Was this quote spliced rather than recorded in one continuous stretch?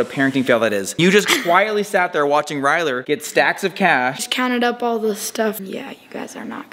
yes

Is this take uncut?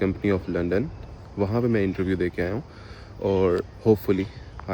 yes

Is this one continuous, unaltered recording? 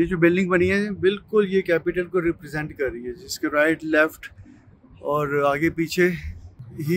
yes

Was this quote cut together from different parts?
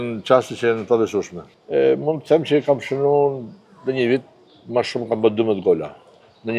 yes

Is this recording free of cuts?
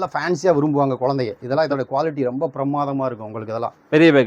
yes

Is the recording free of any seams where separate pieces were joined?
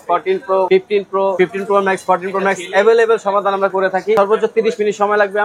no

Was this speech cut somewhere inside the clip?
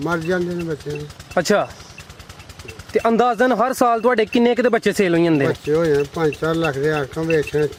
no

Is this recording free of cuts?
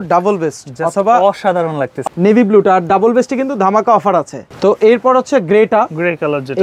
no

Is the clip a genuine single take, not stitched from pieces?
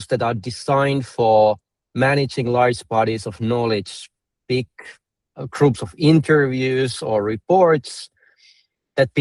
yes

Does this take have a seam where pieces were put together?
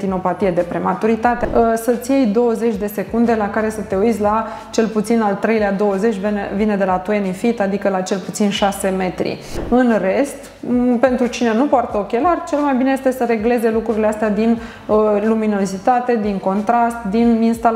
yes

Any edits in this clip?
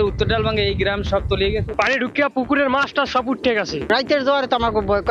yes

